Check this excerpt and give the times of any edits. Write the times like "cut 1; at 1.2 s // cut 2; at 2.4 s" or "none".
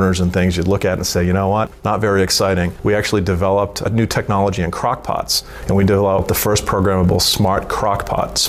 cut 1; at 1.8 s // cut 2; at 2.7 s // cut 3; at 5.5 s